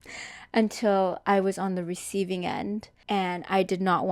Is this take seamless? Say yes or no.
no